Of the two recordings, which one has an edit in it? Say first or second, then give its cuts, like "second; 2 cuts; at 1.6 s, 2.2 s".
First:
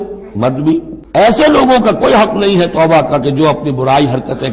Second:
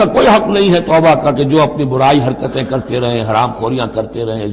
first; 1 cut; at 1.0 s